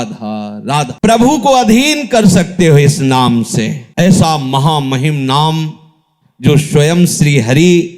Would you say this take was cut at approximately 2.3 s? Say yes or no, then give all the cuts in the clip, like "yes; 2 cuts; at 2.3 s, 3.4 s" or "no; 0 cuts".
no; 2 cuts; at 0.9 s, 3.8 s